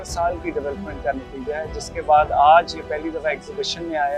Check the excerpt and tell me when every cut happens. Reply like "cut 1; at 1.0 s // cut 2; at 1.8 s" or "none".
none